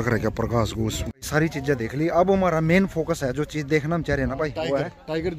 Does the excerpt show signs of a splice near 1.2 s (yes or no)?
yes